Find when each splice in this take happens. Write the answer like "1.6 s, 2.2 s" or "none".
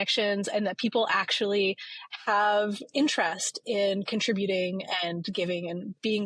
none